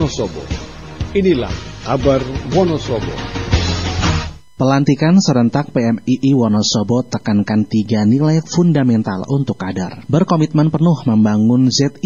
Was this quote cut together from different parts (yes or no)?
no